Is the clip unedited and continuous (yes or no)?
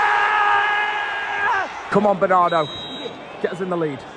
no